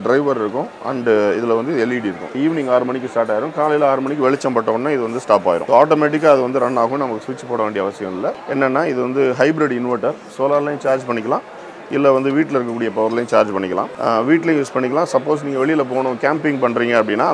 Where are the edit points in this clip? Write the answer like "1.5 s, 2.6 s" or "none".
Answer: 2.3 s, 5.6 s, 8.4 s, 13.9 s